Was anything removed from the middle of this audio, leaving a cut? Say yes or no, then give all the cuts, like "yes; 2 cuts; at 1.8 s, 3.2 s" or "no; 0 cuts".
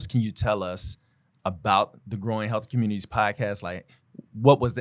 no; 0 cuts